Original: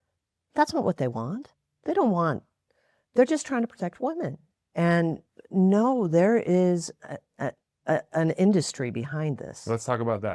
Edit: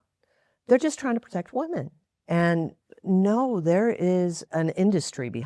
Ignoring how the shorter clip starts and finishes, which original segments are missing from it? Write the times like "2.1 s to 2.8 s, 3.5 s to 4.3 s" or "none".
6.9 s to 8.1 s